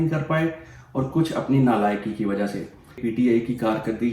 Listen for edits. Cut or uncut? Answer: cut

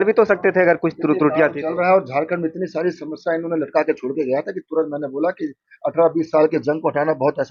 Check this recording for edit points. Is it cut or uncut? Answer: uncut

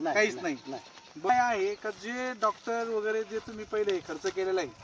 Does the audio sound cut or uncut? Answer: cut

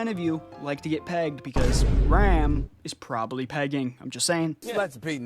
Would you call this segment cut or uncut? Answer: uncut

